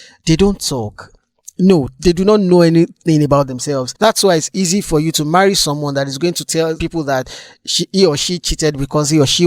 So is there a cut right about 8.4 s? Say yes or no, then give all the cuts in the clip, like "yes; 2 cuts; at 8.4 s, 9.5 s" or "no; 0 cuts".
no; 2 cuts; at 3.9 s, 6.8 s